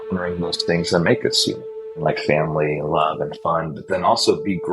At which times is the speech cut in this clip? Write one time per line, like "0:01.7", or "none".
0:01.9